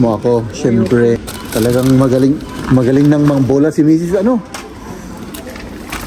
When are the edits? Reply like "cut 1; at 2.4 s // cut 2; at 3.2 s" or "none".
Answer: cut 1; at 1.2 s